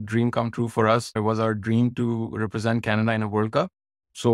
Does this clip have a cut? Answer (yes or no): yes